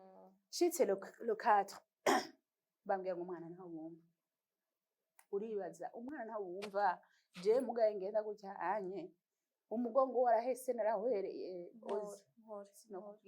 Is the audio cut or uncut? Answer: uncut